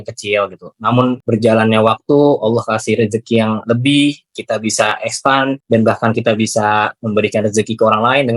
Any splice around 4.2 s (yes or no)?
no